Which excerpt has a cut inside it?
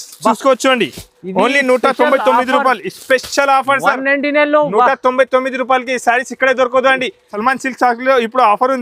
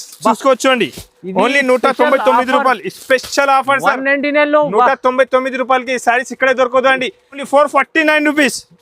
second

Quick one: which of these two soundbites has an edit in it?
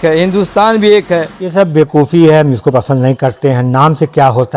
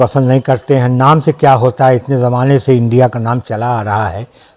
first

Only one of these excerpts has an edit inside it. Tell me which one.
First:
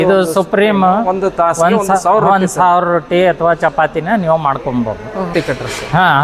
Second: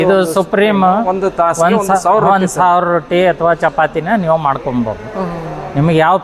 first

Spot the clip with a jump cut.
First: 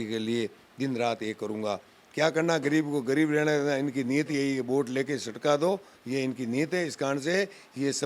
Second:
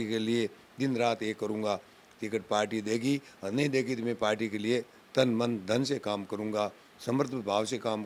first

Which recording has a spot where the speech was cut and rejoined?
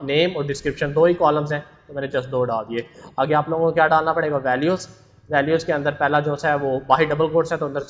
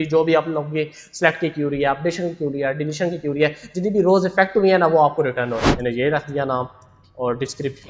second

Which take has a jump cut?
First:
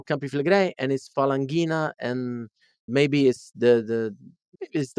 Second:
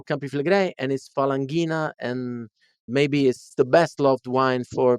second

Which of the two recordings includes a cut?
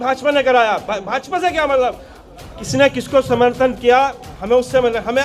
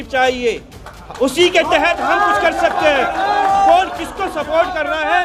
first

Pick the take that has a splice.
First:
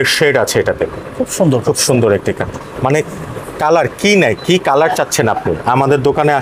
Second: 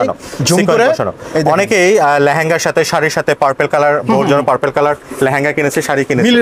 first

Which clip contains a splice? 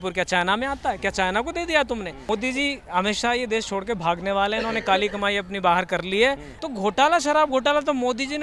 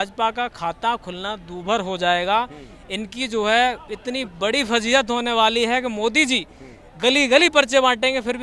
first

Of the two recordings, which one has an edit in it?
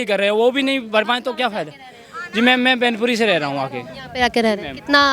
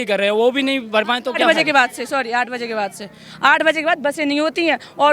second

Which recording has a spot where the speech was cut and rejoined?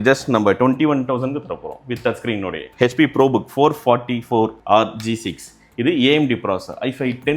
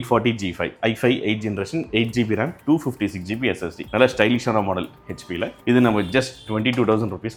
first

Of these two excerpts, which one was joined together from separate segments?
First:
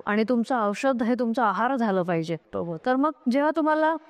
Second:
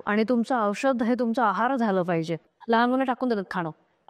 second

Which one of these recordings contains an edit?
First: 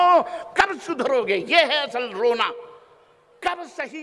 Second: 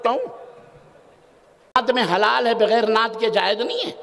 second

